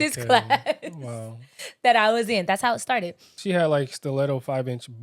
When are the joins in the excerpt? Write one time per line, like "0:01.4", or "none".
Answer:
0:03.3